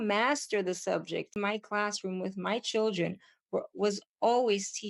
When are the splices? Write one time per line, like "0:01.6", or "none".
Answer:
0:01.3